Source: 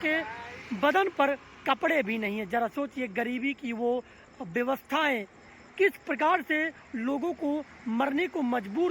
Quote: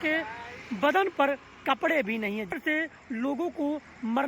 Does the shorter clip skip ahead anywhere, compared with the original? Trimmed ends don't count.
yes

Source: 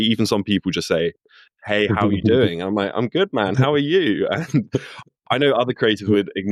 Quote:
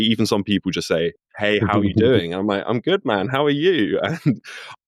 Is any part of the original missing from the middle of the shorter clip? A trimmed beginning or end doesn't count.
yes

